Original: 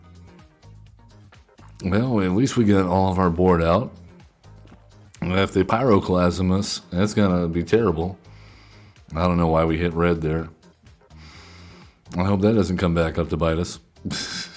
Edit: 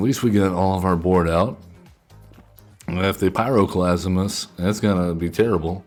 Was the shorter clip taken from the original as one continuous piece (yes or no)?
yes